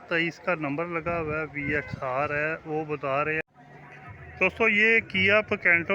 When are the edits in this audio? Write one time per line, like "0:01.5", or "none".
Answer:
0:03.5